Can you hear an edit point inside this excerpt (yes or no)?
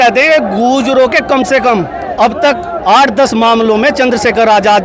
no